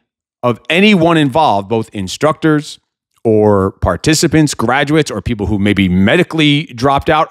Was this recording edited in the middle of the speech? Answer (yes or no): no